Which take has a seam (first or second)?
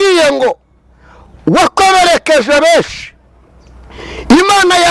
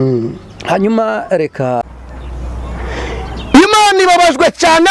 second